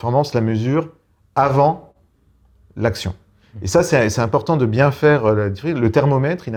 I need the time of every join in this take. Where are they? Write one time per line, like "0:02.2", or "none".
none